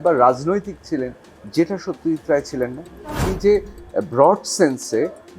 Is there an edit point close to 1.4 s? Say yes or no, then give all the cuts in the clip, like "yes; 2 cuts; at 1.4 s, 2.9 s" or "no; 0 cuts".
no; 1 cut; at 3.3 s